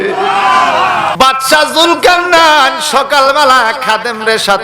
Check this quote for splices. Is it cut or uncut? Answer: cut